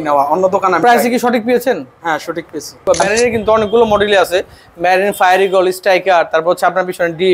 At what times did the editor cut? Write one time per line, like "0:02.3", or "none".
0:02.8